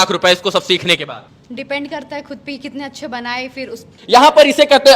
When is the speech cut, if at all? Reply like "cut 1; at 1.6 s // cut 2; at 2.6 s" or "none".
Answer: cut 1; at 1.3 s // cut 2; at 3.9 s